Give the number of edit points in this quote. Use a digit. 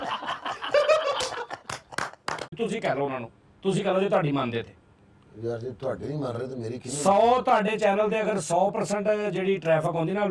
1